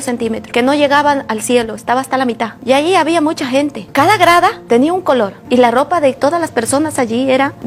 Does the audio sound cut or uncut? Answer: uncut